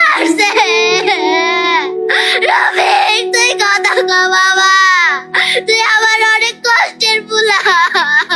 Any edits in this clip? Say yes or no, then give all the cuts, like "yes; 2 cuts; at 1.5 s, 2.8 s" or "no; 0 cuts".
no; 0 cuts